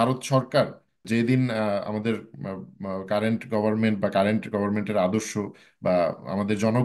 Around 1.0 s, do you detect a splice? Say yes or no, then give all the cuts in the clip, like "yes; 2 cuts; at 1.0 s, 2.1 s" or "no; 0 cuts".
yes; 1 cut; at 1.0 s